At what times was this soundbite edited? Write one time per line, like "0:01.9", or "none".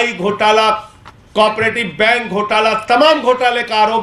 none

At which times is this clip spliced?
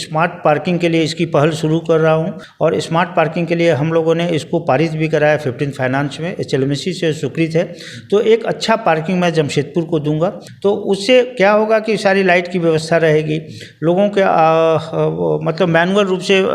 0:02.4
0:10.5

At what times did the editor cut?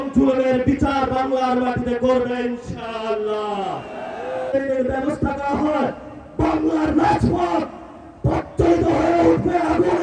0:04.5

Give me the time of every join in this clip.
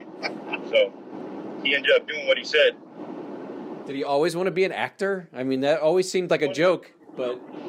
none

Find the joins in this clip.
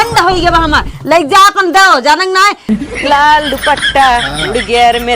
0:02.7

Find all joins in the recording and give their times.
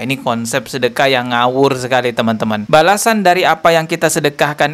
0:02.6

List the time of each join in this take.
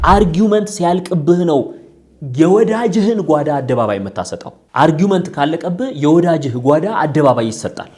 none

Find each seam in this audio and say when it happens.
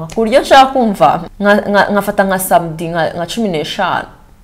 0:01.3

